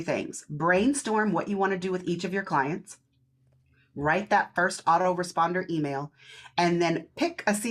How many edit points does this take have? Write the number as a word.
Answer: zero